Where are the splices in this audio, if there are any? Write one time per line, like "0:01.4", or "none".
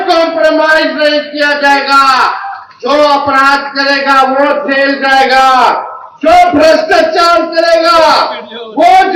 none